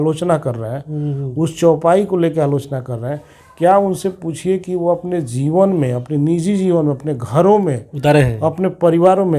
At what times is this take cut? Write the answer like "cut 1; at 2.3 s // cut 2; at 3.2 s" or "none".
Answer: none